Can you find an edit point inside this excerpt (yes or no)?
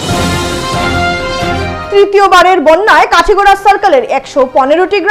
yes